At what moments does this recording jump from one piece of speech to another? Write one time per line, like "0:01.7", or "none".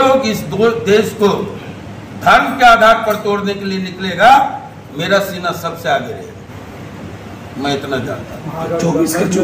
none